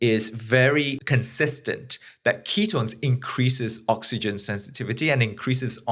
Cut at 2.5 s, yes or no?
no